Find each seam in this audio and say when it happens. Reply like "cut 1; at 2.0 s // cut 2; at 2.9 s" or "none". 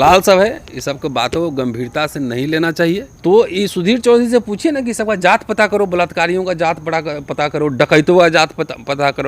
cut 1; at 3.1 s

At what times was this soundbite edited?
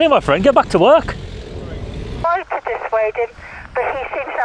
cut 1; at 2.2 s

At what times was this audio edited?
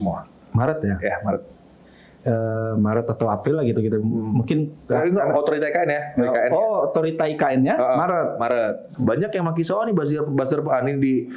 cut 1; at 8.9 s

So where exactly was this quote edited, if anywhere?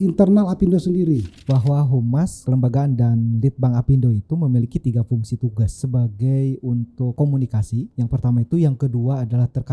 cut 1; at 1.3 s // cut 2; at 2.4 s // cut 3; at 5.8 s // cut 4; at 7.1 s // cut 5; at 7.9 s

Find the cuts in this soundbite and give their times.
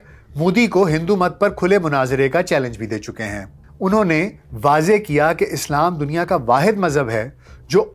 cut 1; at 3.6 s

